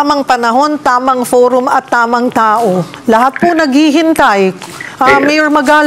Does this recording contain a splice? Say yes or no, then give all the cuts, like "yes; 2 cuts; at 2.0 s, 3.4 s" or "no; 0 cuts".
no; 0 cuts